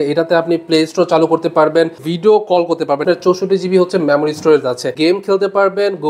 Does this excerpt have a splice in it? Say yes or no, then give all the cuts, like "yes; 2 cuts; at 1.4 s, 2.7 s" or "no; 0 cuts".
yes; 3 cuts; at 2.1 s, 3.0 s, 4.9 s